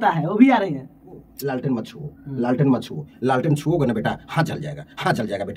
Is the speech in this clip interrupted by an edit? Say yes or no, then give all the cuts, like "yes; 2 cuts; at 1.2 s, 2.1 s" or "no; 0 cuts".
yes; 1 cut; at 1.3 s